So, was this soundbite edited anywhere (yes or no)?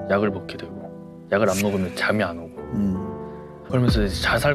yes